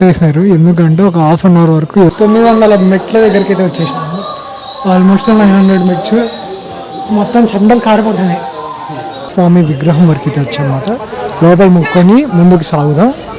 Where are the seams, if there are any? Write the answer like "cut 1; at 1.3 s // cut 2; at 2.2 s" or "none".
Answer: cut 1; at 2.1 s // cut 2; at 9.3 s

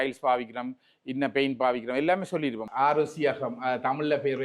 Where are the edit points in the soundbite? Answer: cut 1; at 2.6 s

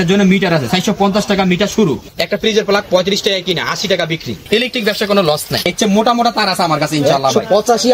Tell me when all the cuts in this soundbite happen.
cut 1; at 2.1 s // cut 2; at 4.4 s // cut 3; at 5.7 s

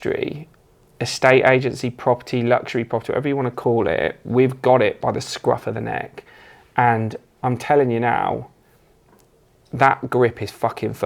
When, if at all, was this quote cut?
none

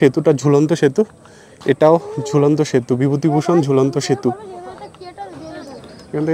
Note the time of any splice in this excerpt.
none

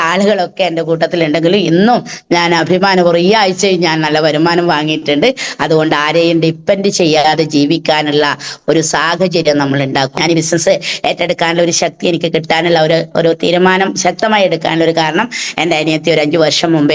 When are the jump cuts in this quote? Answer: cut 1; at 10.1 s

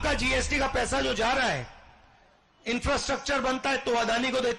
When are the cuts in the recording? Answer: none

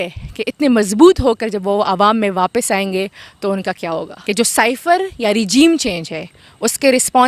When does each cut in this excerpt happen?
cut 1; at 4.1 s

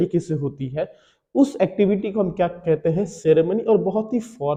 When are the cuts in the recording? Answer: none

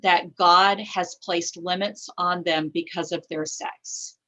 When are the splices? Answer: none

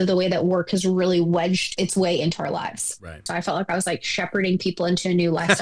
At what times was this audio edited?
cut 1; at 1.7 s // cut 2; at 3.3 s

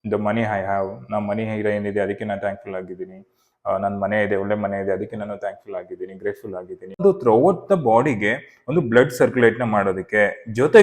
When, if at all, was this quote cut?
cut 1; at 7.0 s

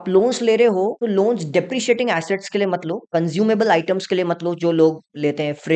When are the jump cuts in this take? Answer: cut 1; at 1.0 s

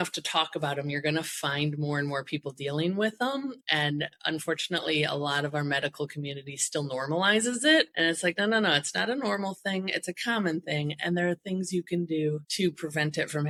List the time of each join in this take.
none

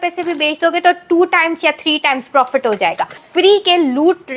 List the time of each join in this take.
cut 1; at 2.2 s // cut 2; at 3.2 s

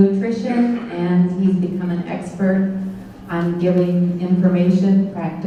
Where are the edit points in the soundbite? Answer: none

